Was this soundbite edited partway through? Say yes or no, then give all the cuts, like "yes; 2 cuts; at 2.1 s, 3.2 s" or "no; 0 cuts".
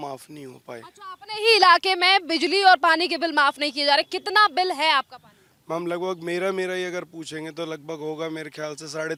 no; 0 cuts